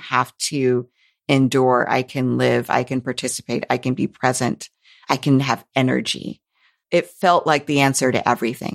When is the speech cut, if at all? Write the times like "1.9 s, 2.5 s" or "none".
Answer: 6.8 s

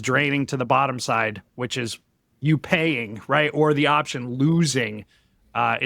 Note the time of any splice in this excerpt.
none

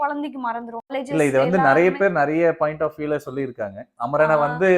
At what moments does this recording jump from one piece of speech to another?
0.9 s

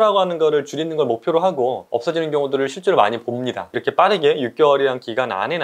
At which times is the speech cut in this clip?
1.9 s, 3.8 s

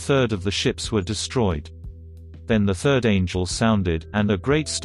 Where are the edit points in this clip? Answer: 2.3 s

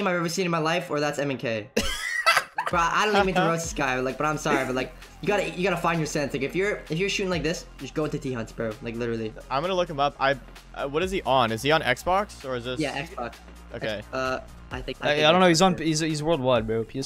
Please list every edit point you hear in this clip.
9.4 s

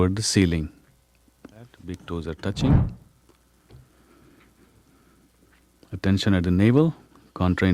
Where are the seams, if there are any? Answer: 1.9 s

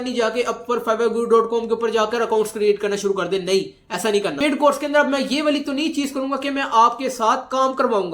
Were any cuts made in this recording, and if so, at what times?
4.4 s

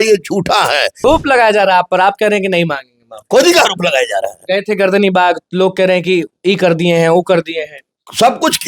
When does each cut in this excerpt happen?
1.0 s

